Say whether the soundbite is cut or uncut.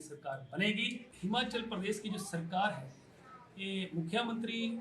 cut